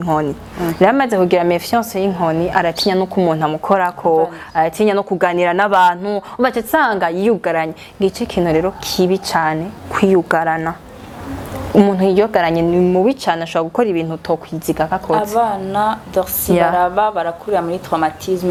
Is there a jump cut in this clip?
no; 0 cuts

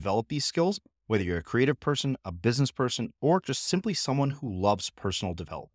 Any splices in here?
no; 0 cuts

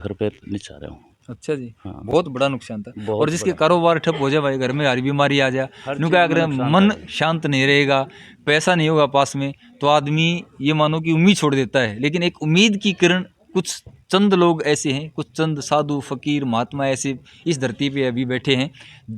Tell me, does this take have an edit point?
no; 0 cuts

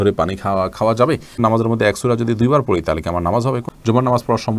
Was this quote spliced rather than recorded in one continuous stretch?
yes; 2 cuts; at 1.3 s, 3.7 s

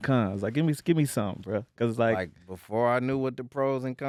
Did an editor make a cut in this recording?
no; 0 cuts

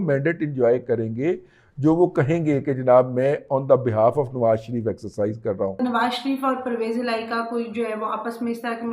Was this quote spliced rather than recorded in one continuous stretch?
yes; 1 cut; at 5.8 s

